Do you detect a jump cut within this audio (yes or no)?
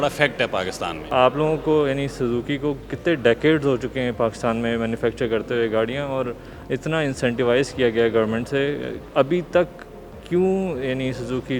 yes